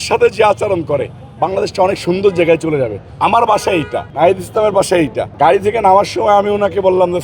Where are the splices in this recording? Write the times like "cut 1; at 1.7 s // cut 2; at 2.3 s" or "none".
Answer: cut 1; at 3.0 s // cut 2; at 4.0 s // cut 3; at 5.2 s